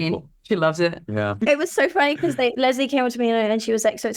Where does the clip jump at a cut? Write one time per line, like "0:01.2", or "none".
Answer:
0:01.4